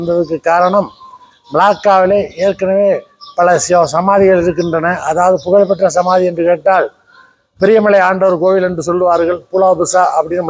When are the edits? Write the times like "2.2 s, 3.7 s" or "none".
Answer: none